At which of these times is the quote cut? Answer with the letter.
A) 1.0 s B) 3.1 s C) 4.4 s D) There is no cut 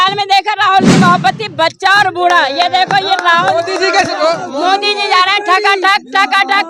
C